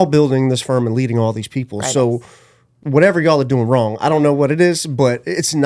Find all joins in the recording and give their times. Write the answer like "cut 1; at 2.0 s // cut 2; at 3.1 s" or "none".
cut 1; at 2.8 s